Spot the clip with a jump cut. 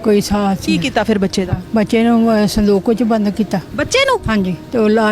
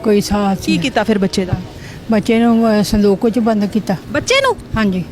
first; 2 cuts; at 1.6 s, 4.3 s

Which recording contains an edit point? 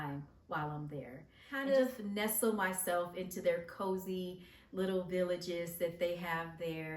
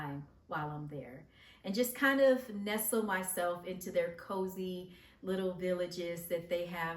first; 1 cut; at 1.6 s

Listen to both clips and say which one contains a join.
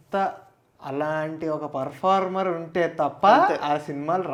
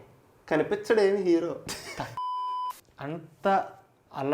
second; 1 cut; at 2.3 s

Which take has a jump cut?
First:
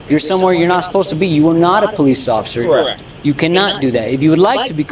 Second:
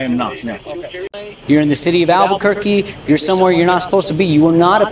second; 1 cut; at 1.3 s

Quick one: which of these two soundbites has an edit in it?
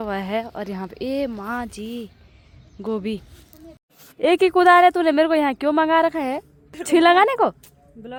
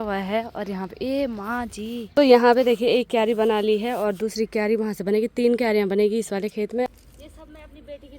second; 2 cuts; at 2.1 s, 6.9 s

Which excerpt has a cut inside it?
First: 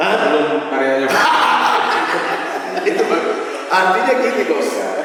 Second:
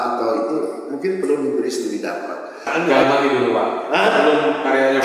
second; 1 cut; at 2.6 s

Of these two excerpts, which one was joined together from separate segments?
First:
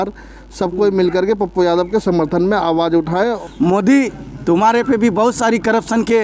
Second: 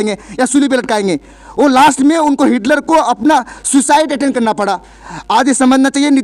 first; 1 cut; at 3.4 s

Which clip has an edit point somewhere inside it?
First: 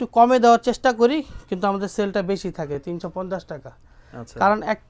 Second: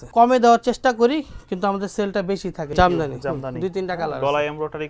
second; 1 cut; at 2.7 s

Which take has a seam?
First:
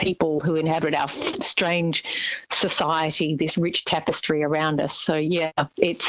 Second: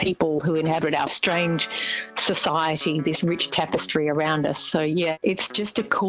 second; 2 cuts; at 1.1 s, 5.2 s

